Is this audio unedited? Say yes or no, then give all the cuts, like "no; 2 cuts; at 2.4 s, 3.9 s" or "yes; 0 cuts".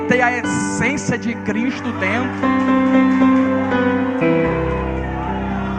yes; 0 cuts